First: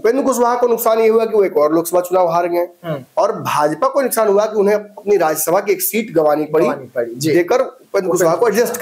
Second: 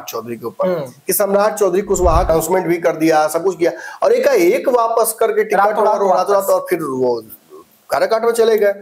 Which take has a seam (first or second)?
second